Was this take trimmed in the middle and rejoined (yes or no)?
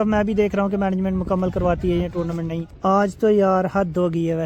no